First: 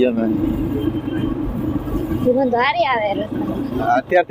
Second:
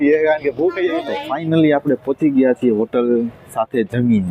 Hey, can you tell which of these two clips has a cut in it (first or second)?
second